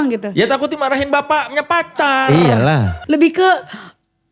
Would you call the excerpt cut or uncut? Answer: cut